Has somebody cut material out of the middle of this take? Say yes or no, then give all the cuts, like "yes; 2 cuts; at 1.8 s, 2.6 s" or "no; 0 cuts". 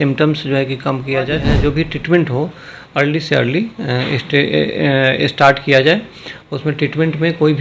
yes; 1 cut; at 1.5 s